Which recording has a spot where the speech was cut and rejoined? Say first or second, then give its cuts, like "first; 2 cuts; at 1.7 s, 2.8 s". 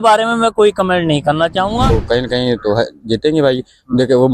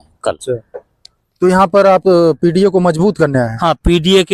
first; 1 cut; at 1.8 s